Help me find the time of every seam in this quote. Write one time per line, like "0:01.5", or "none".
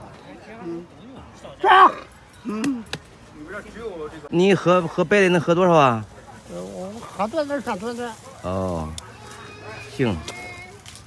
0:04.3